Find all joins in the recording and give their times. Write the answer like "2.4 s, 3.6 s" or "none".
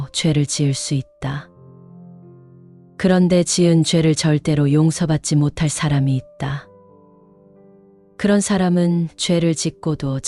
1.4 s, 2.9 s, 6.6 s, 8.1 s